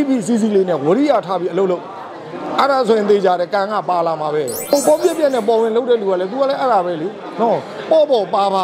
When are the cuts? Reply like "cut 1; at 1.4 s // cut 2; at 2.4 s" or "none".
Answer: cut 1; at 4.6 s